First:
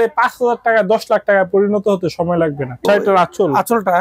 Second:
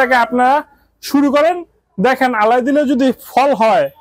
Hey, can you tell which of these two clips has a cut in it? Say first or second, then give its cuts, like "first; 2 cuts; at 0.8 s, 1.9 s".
first; 1 cut; at 2.8 s